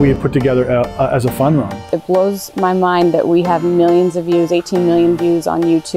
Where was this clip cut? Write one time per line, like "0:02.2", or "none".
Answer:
0:01.8